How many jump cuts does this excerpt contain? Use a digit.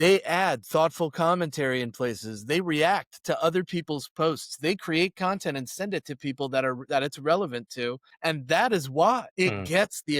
2